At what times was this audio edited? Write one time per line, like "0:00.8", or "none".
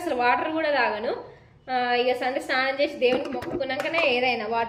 none